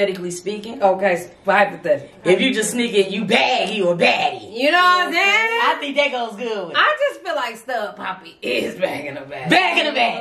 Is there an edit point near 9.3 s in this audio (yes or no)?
no